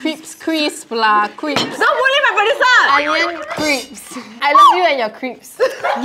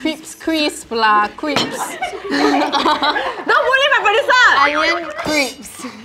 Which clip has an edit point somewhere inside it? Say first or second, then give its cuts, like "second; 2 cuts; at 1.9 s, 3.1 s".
first; 2 cuts; at 1.7 s, 4.3 s